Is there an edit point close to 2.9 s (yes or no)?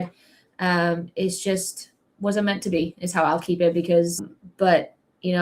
no